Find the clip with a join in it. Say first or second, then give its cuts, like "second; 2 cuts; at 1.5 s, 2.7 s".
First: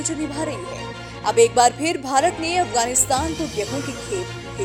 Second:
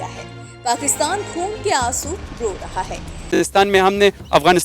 second; 1 cut; at 3.4 s